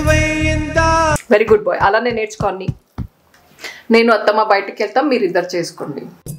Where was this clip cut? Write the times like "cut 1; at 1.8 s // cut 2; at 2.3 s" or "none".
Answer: cut 1; at 1.2 s